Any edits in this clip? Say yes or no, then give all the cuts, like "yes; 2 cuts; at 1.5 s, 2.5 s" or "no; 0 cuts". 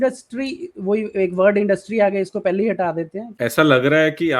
yes; 1 cut; at 3.3 s